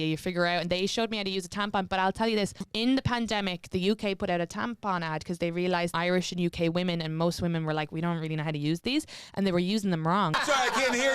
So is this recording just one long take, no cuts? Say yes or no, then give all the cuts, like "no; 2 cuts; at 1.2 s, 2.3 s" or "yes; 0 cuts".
no; 3 cuts; at 2.6 s, 5.9 s, 10.4 s